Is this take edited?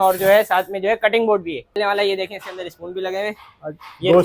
yes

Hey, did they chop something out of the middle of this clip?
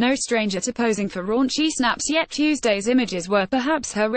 yes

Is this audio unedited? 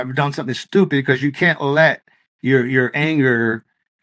yes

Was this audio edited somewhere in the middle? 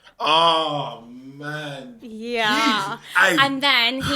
no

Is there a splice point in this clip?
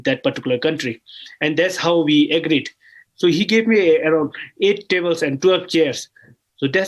no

